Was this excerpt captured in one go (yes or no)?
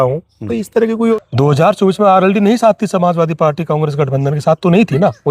no